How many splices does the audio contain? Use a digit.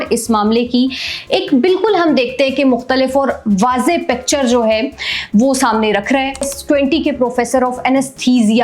1